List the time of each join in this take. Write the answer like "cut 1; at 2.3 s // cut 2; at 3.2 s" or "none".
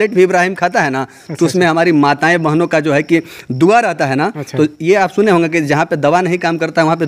none